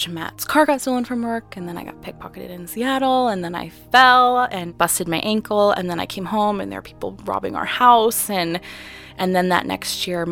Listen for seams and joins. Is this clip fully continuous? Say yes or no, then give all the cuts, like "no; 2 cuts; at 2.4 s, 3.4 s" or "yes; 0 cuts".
no; 1 cut; at 4.7 s